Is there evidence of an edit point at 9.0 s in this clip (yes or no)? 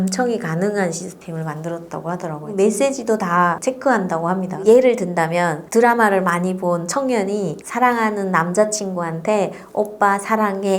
no